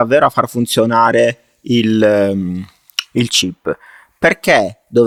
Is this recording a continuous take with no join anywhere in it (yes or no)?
yes